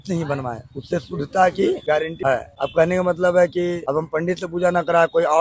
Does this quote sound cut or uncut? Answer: cut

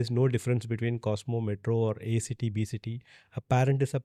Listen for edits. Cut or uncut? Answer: uncut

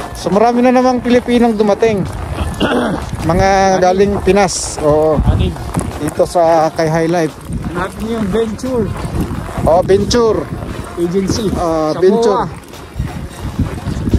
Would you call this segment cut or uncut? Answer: uncut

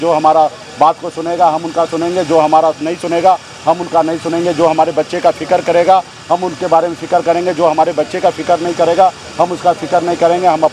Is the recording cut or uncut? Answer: uncut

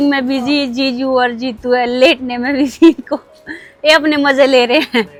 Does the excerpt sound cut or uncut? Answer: uncut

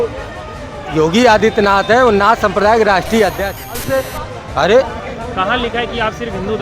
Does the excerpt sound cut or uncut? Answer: cut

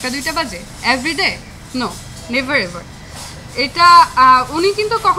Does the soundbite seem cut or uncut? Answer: uncut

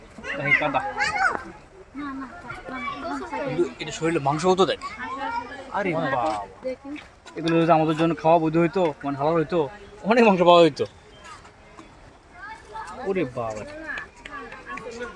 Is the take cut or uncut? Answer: uncut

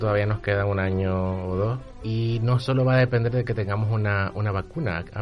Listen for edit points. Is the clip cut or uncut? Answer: cut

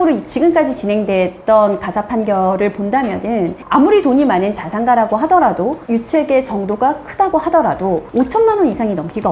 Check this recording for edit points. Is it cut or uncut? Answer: uncut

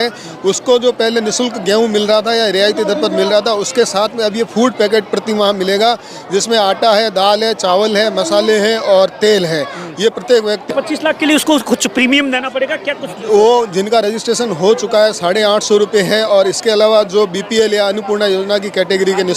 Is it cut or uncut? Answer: cut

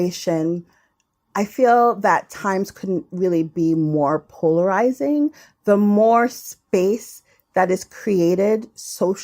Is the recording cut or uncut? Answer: uncut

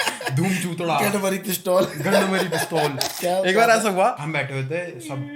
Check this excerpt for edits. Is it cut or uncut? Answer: cut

